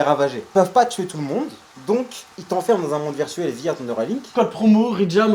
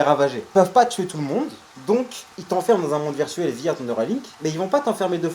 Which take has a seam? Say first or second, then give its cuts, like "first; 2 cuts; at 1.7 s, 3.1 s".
first; 1 cut; at 4.3 s